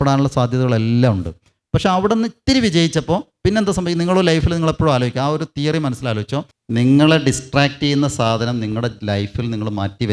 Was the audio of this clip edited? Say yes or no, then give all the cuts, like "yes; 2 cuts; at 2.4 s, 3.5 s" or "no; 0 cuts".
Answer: yes; 1 cut; at 6.5 s